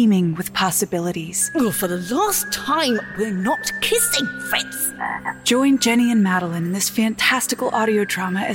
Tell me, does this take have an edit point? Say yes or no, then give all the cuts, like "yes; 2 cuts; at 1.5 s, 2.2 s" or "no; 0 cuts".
yes; 2 cuts; at 1.5 s, 5.3 s